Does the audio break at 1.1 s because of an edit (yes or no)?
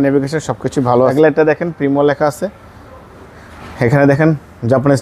yes